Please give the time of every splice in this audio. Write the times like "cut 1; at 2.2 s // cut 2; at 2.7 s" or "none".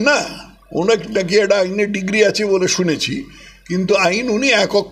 none